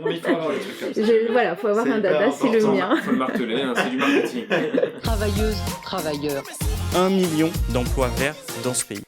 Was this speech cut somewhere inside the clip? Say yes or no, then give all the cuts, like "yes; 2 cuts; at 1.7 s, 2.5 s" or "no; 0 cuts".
yes; 1 cut; at 5.0 s